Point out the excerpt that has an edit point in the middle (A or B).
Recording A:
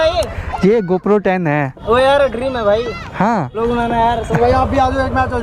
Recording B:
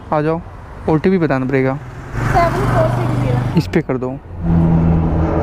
B